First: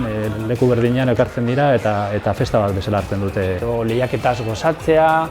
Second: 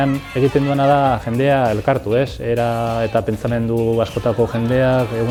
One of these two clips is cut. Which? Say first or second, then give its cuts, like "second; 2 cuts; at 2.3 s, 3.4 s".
first; 1 cut; at 3.6 s